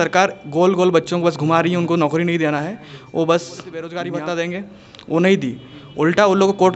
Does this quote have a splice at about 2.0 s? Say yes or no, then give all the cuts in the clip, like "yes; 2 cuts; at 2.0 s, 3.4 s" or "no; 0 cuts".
no; 1 cut; at 3.9 s